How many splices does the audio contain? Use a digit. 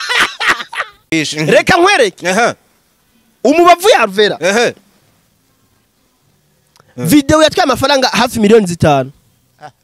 1